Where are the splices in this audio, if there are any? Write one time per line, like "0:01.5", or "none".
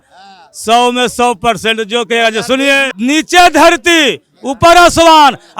0:02.9